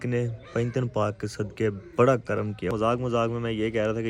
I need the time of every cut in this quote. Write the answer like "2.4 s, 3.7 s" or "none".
2.7 s

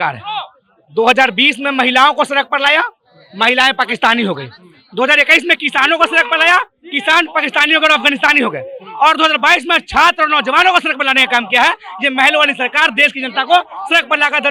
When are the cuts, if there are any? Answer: none

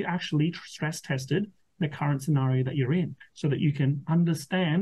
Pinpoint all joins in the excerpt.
3.2 s

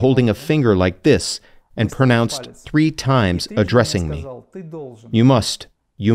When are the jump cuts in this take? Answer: none

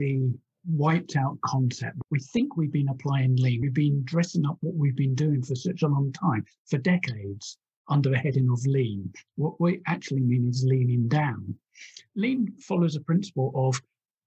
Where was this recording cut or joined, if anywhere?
1.9 s, 3.6 s, 12.0 s

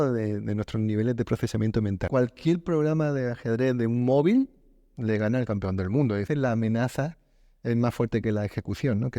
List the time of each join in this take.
2.1 s, 6.3 s

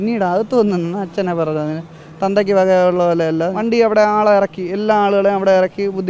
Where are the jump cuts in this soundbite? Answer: 3.6 s

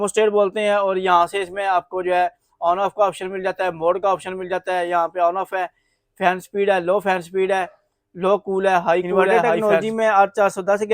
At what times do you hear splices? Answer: 9.5 s

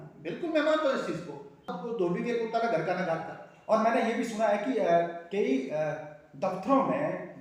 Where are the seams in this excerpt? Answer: 1.7 s

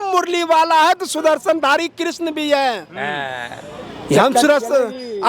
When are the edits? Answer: none

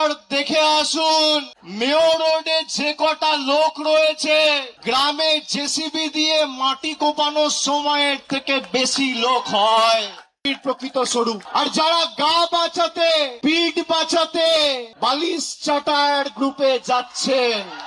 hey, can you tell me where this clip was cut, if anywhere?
1.6 s, 4.7 s, 10.4 s, 11.4 s, 13.3 s, 14.9 s

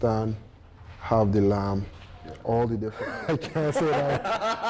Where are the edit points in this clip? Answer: 3.0 s

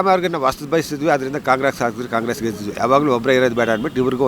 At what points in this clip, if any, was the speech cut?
2.7 s

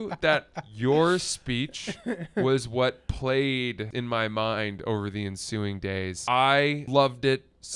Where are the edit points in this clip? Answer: 3.9 s, 6.2 s, 6.8 s

